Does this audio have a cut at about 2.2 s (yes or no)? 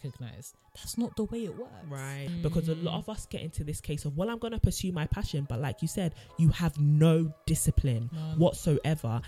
yes